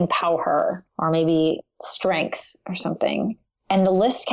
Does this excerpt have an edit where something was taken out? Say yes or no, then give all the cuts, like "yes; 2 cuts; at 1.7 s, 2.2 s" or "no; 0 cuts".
no; 0 cuts